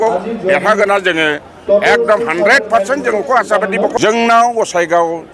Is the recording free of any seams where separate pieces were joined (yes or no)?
no